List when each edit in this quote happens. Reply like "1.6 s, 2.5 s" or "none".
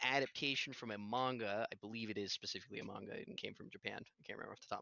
none